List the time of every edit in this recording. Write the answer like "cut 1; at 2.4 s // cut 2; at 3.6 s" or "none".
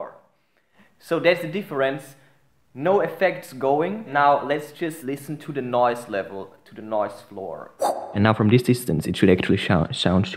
cut 1; at 8.1 s